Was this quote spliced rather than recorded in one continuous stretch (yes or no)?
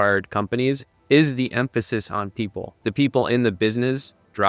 yes